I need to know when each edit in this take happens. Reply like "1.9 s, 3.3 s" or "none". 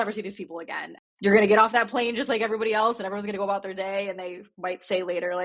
1.0 s